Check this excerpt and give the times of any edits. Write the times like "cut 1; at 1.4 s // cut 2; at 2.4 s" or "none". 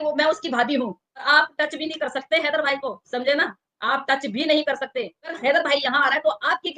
cut 1; at 1.2 s // cut 2; at 5.2 s